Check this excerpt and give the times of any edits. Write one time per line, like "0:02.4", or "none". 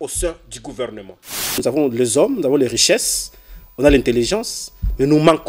0:01.5